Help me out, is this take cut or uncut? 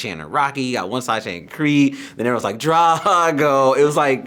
uncut